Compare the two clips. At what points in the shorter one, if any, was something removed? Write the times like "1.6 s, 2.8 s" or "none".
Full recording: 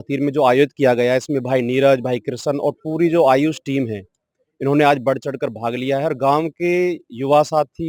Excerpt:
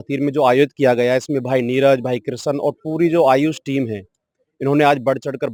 none